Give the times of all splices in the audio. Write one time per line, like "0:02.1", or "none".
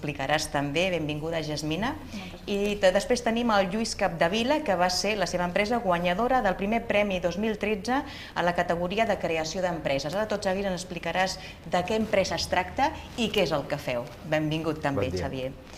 0:05.1